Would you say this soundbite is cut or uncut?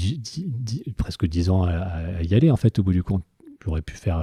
uncut